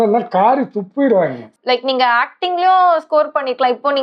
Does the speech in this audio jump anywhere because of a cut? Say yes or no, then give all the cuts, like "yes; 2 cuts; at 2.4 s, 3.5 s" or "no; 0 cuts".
yes; 1 cut; at 1.5 s